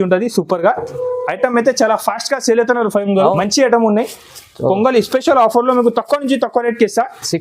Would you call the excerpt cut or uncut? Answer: cut